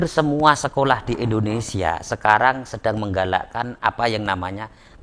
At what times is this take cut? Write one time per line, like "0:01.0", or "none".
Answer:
none